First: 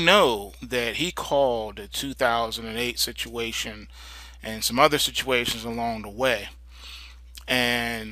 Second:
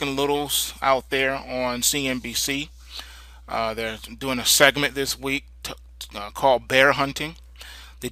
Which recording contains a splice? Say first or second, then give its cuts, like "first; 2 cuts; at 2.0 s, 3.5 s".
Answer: second; 1 cut; at 4.1 s